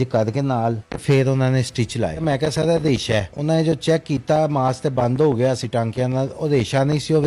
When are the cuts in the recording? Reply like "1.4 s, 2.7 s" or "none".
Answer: 0.9 s, 2.2 s, 3.3 s